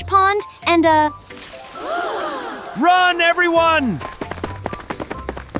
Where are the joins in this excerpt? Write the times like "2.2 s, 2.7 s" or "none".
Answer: 1.2 s, 2.6 s